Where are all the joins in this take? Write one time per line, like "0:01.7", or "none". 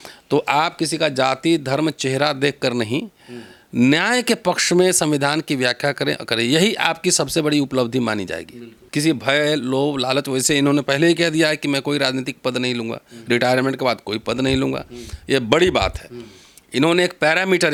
none